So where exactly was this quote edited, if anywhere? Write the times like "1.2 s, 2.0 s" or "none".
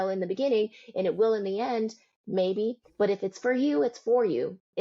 none